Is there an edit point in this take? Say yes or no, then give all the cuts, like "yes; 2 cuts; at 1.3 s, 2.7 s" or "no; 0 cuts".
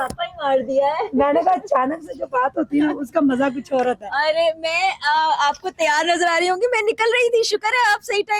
no; 0 cuts